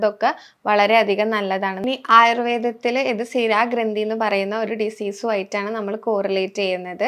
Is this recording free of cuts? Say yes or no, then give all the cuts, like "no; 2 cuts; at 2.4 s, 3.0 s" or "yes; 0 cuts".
no; 1 cut; at 1.8 s